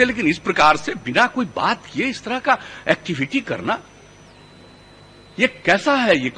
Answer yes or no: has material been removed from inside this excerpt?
no